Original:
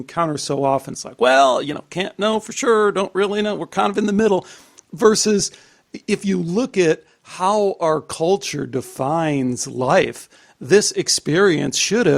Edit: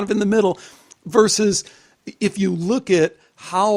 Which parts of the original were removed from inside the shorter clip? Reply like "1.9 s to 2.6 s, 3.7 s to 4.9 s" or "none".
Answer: none